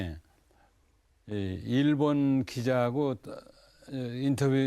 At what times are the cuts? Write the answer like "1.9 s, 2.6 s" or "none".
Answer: 3.5 s